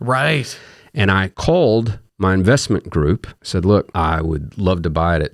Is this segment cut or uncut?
cut